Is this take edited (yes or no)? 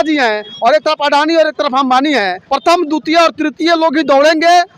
yes